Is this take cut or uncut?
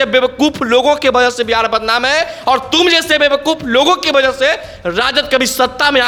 uncut